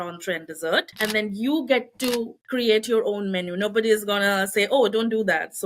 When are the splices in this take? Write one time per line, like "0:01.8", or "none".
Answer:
0:00.9
0:02.4